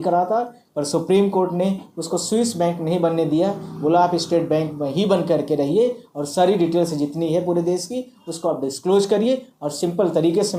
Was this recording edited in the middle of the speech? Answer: no; 0 cuts

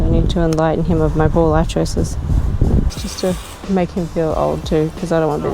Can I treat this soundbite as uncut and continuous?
no; 1 cut; at 2.9 s

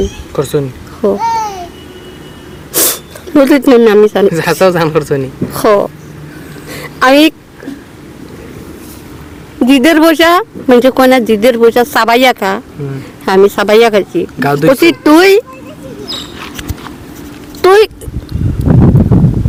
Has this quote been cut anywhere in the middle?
no; 0 cuts

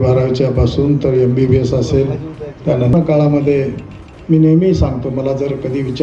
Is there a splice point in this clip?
yes; 1 cut; at 2.9 s

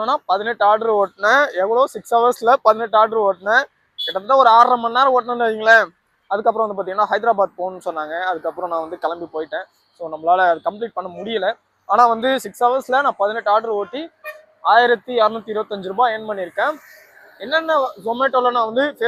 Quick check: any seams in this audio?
no; 0 cuts

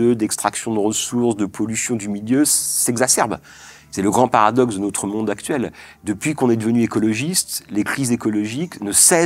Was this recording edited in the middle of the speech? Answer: no; 0 cuts

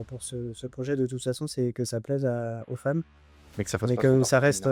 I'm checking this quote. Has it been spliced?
no; 0 cuts

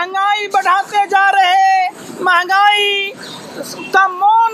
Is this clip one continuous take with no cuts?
yes; 0 cuts

